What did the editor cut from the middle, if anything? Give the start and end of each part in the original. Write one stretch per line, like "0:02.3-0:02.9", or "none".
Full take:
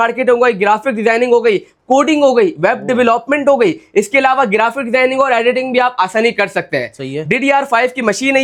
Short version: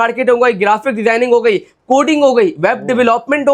none